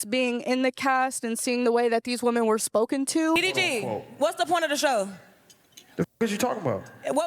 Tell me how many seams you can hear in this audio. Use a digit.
1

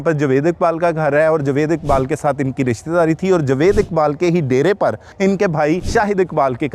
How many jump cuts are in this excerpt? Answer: 2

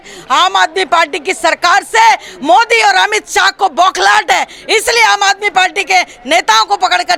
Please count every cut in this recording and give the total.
0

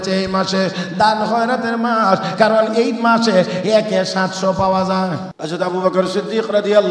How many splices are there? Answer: 1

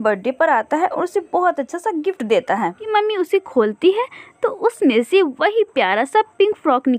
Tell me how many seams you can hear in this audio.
1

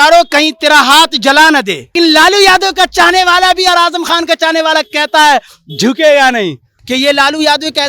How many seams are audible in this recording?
2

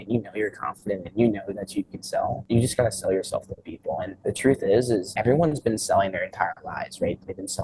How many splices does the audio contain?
3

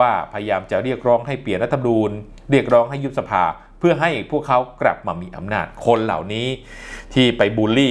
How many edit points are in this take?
0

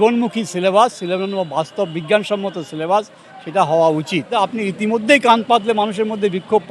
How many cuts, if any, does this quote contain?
1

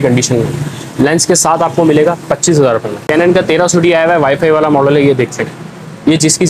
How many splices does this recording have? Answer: 1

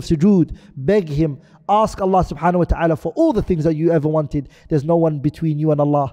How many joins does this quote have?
0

